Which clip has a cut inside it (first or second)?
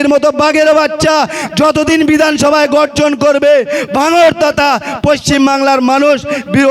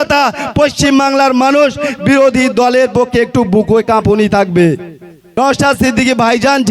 second